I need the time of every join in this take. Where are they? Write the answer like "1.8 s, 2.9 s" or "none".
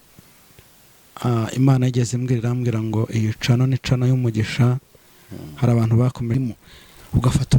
6.3 s